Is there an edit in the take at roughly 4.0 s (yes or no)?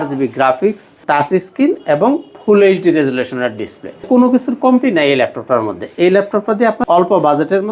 yes